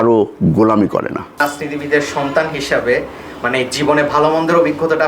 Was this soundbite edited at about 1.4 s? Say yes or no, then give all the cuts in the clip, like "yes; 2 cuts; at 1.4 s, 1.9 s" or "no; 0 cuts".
yes; 1 cut; at 1.4 s